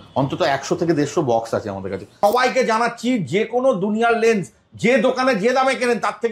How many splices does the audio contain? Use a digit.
1